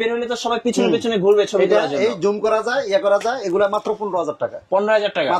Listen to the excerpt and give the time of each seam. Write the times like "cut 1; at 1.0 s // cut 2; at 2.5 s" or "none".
none